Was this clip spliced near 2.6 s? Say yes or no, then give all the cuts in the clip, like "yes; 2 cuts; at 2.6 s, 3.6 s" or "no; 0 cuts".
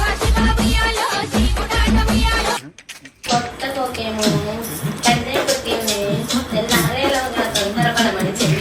yes; 2 cuts; at 1.2 s, 2.6 s